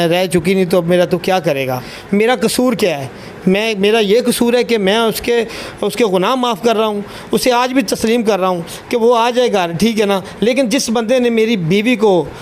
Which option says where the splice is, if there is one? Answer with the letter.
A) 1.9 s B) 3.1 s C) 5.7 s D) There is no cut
A